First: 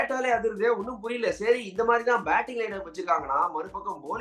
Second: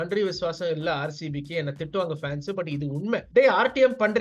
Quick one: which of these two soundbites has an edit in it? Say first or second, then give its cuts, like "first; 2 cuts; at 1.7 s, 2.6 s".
second; 1 cut; at 3.3 s